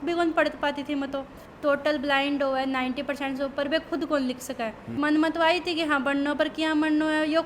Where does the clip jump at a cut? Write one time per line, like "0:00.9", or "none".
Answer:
0:01.4
0:04.8